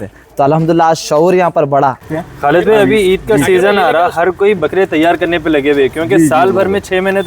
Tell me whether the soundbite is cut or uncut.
cut